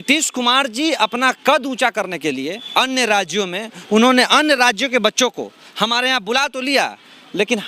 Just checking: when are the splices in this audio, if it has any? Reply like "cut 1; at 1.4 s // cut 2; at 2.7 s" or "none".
none

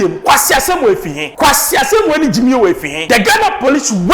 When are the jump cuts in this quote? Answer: cut 1; at 1.2 s // cut 2; at 2.9 s

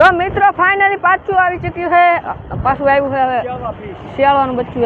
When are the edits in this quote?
none

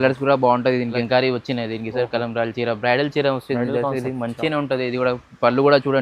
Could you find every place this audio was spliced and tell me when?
cut 1; at 1.0 s

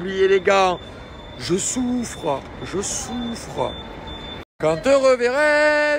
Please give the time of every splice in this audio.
cut 1; at 4.5 s

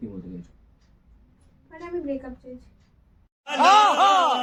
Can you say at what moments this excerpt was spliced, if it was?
none

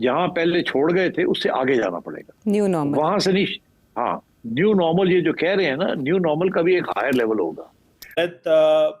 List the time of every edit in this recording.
cut 1; at 8.0 s

